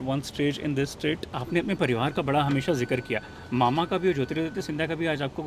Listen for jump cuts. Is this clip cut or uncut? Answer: cut